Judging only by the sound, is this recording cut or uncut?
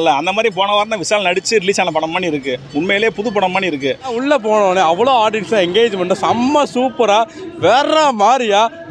cut